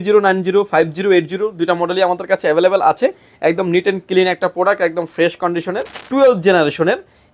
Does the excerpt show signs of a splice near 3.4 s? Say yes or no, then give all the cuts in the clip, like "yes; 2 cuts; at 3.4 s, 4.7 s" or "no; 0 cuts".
no; 1 cut; at 5.9 s